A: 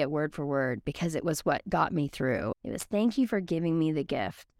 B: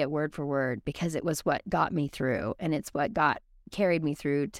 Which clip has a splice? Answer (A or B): A